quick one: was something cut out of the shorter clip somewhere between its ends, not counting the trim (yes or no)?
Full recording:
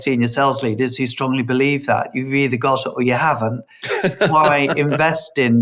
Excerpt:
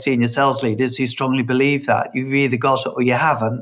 no